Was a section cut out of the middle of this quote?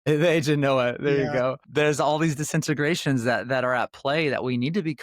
yes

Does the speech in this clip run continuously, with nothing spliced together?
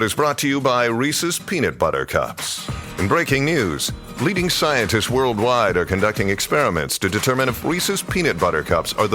yes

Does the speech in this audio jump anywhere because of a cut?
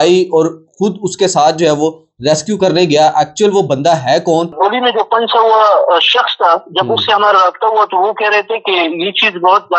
yes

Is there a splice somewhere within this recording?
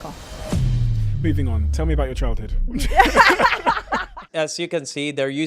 yes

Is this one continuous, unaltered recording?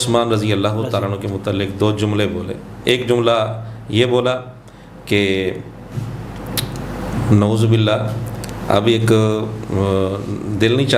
yes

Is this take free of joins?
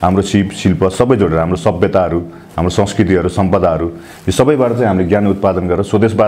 yes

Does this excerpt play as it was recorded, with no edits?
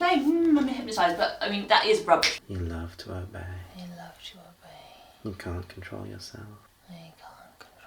no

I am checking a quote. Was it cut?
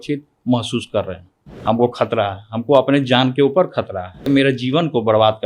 yes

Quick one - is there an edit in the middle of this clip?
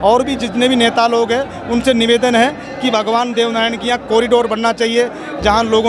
no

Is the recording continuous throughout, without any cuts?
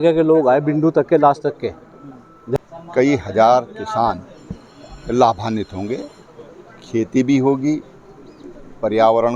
no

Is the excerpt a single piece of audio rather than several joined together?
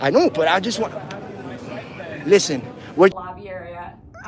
no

